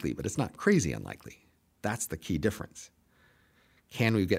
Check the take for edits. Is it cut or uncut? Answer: uncut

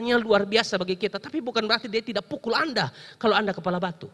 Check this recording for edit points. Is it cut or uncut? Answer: uncut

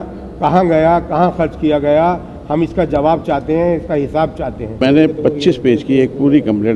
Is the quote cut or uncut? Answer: cut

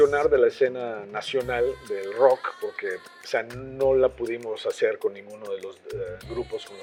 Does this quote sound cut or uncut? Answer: uncut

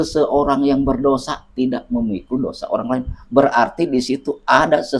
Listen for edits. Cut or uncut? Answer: uncut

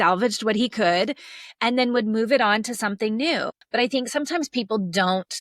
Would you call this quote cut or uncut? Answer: cut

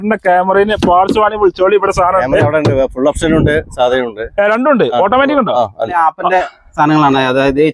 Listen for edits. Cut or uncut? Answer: cut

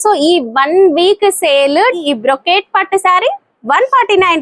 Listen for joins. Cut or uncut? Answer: cut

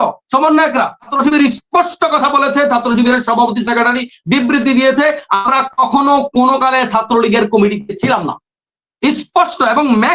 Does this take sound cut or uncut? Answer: cut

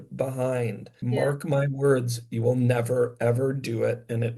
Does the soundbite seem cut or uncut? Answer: cut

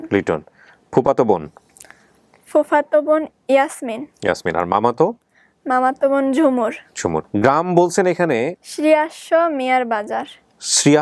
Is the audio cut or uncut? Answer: cut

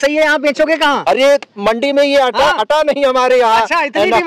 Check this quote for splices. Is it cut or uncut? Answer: uncut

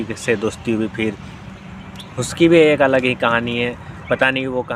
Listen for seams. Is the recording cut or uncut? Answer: uncut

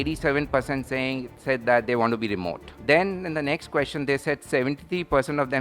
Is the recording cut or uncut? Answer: cut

